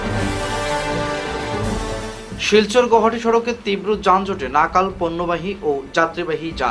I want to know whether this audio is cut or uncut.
cut